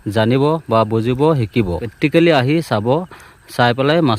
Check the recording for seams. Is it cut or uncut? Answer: cut